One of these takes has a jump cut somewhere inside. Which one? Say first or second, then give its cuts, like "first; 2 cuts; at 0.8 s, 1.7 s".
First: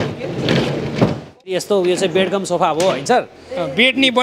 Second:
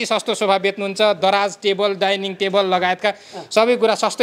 first; 1 cut; at 1.5 s